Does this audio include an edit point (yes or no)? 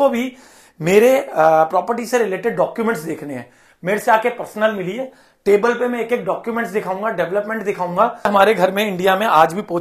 yes